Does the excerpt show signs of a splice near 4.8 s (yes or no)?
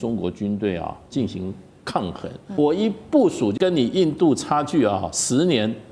no